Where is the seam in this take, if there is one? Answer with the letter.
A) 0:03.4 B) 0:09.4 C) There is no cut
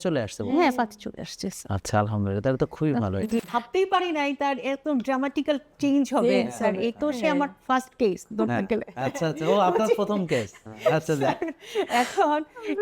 A